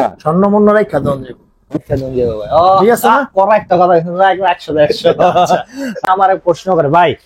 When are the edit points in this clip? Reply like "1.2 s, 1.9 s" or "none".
6.0 s